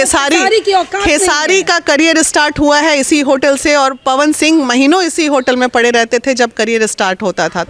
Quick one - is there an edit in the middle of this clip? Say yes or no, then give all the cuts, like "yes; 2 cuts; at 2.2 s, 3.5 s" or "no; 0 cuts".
no; 0 cuts